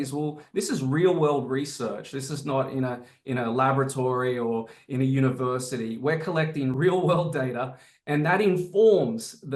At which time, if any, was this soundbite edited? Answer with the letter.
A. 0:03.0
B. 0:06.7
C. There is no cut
B